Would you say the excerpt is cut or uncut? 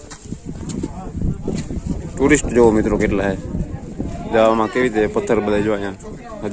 cut